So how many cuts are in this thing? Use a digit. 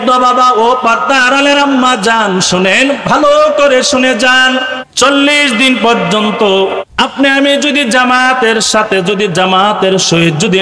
2